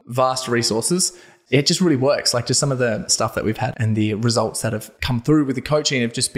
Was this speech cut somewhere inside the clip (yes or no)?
yes